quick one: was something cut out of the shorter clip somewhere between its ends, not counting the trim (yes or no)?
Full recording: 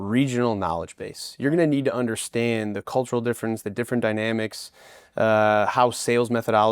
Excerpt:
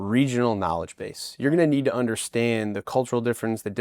no